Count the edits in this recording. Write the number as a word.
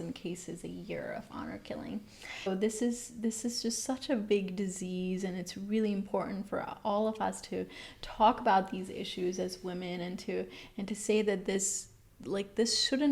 one